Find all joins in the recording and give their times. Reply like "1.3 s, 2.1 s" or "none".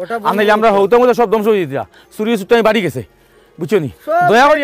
none

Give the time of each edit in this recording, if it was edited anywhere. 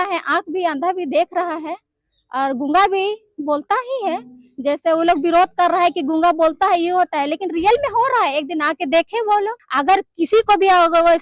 9.6 s

